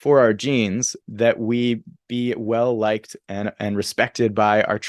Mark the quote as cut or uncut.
cut